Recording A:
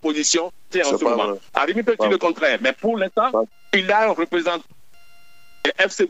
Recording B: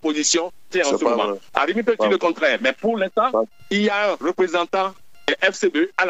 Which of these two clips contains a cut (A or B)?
B